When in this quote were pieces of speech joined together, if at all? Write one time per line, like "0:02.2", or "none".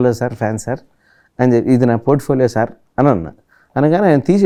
none

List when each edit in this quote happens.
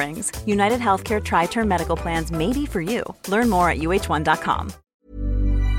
0:04.8

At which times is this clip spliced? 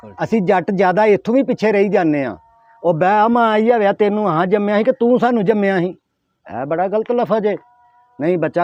none

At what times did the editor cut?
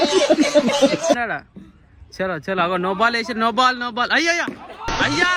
none

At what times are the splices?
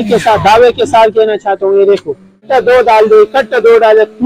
0:02.5

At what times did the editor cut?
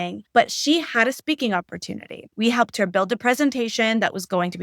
0:02.2

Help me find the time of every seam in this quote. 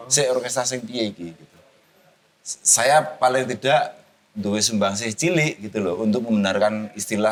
none

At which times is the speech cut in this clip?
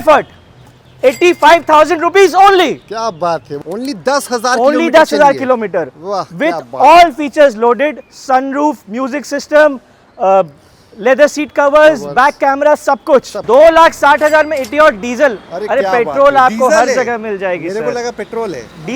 0:03.5
0:13.4

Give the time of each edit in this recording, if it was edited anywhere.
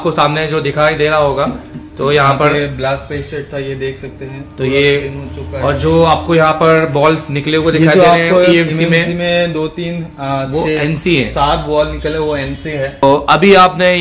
0:13.0

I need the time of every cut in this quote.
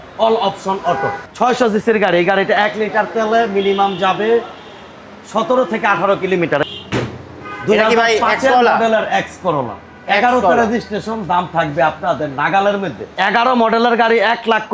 0:01.2
0:06.6
0:13.0

